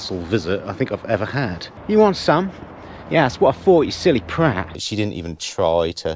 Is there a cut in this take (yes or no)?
yes